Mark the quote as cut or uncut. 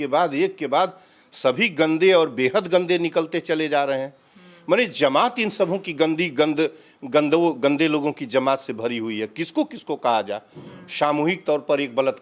uncut